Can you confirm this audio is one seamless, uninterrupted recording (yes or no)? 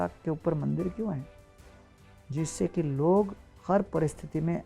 yes